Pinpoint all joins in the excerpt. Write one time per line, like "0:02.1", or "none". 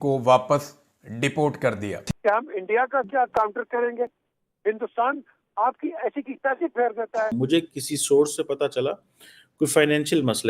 0:07.3